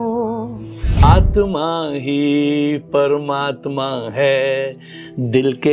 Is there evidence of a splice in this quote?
yes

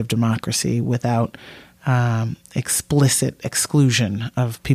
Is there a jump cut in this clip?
no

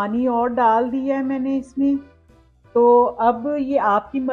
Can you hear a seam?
no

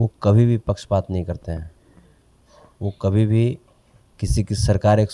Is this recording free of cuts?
yes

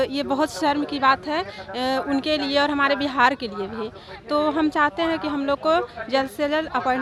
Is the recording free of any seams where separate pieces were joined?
yes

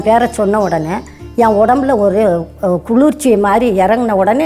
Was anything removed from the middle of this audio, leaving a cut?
no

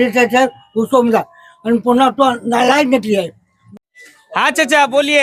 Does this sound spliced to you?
yes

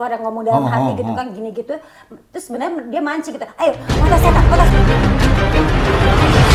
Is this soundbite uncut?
yes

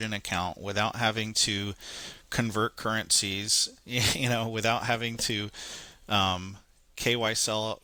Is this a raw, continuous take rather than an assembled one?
yes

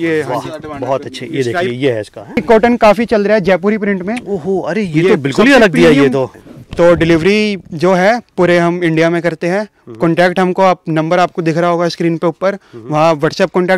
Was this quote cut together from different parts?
yes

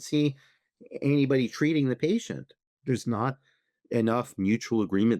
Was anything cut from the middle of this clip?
yes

